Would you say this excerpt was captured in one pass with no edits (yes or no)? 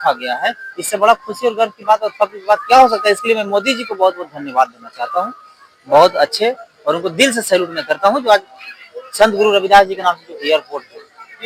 yes